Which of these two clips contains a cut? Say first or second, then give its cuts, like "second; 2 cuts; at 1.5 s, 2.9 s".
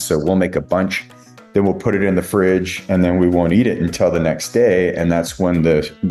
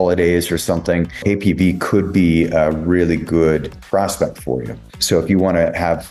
second; 3 cuts; at 1.2 s, 3.7 s, 5.0 s